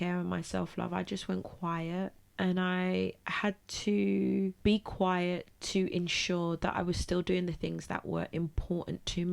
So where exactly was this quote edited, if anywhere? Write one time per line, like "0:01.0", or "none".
0:02.2
0:04.6